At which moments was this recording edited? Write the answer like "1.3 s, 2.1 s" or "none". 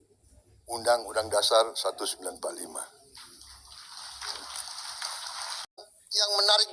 5.8 s